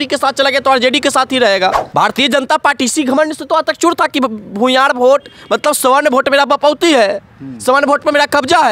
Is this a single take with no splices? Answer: no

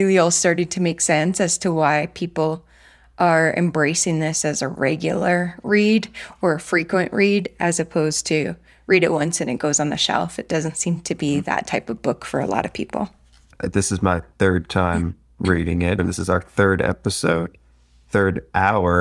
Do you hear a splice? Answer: yes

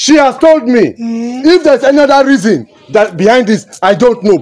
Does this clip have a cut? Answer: no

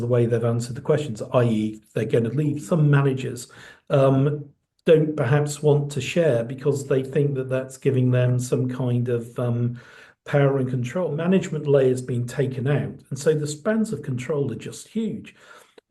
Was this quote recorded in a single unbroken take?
no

